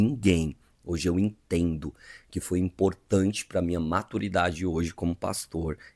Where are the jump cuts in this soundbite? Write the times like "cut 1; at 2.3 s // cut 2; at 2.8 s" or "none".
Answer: none